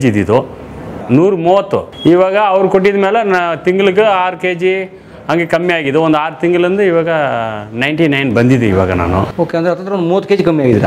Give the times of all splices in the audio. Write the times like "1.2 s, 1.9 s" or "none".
1.0 s, 1.9 s

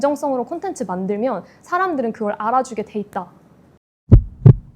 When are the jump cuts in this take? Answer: 3.7 s

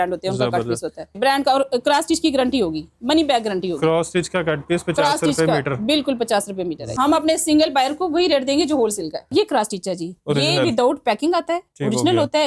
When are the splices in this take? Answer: 1.2 s, 6.9 s, 9.3 s

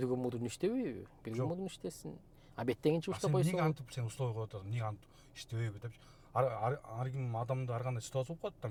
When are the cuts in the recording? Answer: none

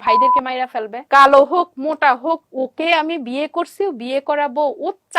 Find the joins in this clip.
0.9 s, 2.5 s

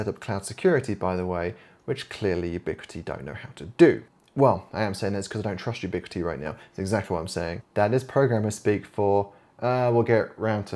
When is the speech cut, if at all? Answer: 4.2 s, 7.6 s

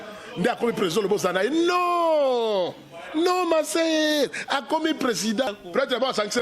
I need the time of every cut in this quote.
5.5 s

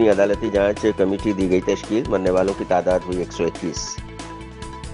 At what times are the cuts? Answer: none

